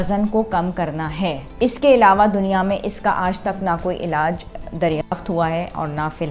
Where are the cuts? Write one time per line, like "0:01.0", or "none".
0:01.4